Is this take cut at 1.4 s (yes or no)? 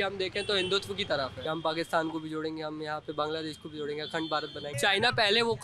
yes